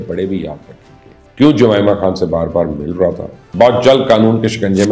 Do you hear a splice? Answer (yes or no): yes